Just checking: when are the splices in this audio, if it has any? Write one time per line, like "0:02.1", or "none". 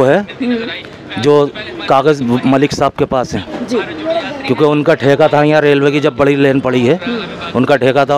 none